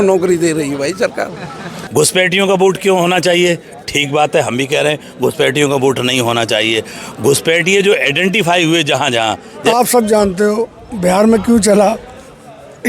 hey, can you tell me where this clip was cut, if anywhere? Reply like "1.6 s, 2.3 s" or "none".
1.7 s, 9.6 s